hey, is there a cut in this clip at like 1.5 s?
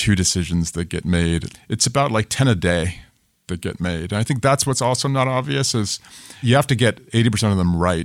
yes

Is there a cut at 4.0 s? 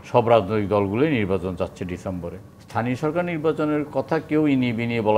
no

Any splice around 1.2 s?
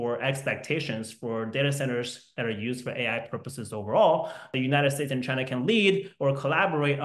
no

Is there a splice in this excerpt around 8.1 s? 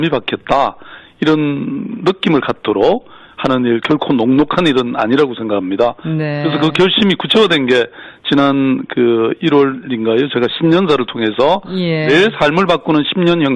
yes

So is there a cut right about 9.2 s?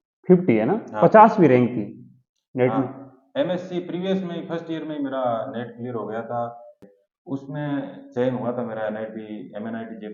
no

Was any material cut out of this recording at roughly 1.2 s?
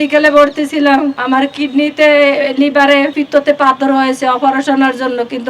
yes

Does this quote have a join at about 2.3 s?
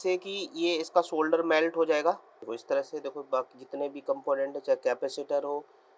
yes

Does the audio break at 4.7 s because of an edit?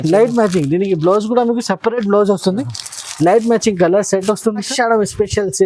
yes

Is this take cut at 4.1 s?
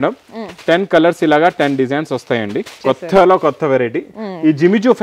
no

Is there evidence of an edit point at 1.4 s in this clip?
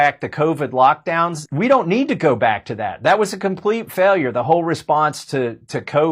yes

